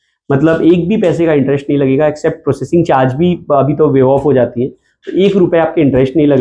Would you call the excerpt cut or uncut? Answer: uncut